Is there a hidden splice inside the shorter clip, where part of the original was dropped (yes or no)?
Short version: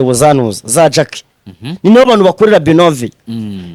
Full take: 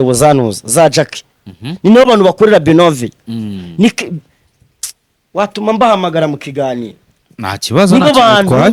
no